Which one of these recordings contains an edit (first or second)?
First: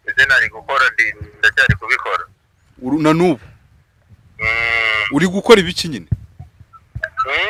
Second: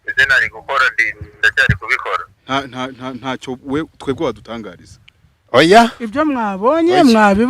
second